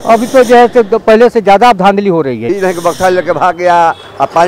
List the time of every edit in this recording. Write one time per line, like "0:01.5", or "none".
0:02.5